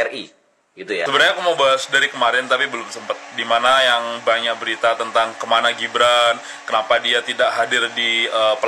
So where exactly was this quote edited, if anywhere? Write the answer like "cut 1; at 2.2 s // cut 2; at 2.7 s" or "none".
cut 1; at 1.1 s